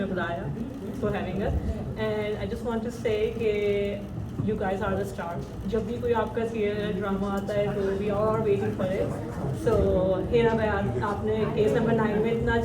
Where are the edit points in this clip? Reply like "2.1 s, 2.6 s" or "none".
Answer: none